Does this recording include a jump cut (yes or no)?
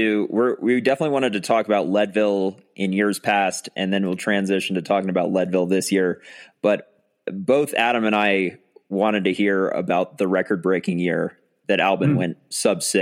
yes